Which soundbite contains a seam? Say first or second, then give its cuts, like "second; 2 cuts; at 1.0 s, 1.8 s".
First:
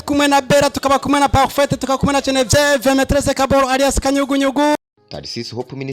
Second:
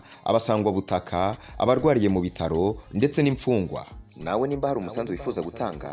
first; 1 cut; at 4.8 s